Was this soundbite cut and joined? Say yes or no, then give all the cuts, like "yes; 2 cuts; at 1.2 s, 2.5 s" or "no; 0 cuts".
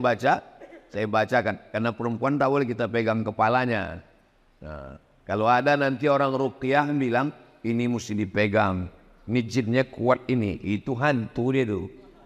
no; 0 cuts